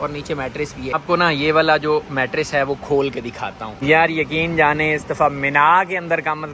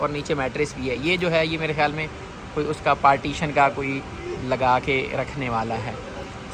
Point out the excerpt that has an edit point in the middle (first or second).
first